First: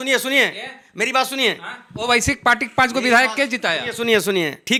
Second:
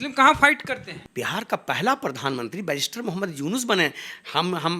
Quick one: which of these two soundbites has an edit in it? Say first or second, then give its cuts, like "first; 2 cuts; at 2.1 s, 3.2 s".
second; 1 cut; at 1.0 s